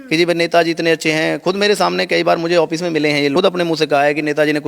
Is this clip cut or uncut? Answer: cut